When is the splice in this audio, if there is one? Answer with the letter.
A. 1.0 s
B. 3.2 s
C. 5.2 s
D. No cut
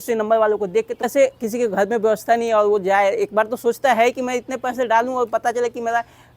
A